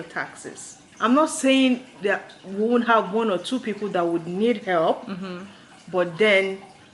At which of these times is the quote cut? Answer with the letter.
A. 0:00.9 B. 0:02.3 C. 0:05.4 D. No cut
D